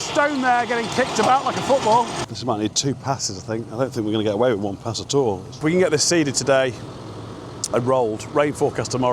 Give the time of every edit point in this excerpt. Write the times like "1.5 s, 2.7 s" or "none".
2.2 s, 5.5 s